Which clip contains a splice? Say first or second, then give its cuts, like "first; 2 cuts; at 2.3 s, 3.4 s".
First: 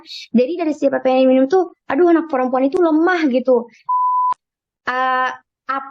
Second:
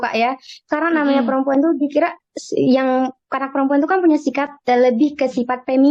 first; 1 cut; at 4.1 s